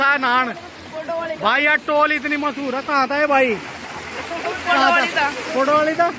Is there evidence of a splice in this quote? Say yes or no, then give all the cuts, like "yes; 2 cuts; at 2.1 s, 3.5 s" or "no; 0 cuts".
no; 0 cuts